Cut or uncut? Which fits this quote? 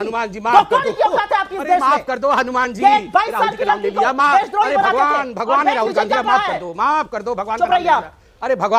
uncut